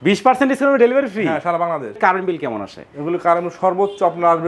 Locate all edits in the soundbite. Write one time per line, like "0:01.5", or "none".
0:02.0